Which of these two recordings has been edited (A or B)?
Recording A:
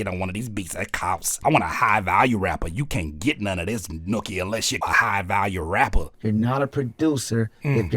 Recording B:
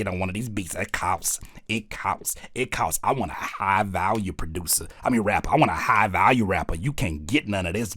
A